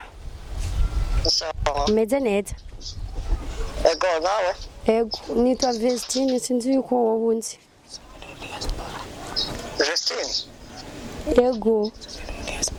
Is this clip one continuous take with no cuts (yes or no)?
yes